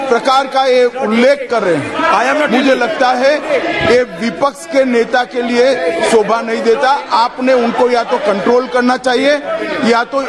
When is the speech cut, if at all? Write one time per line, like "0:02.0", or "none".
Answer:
0:09.0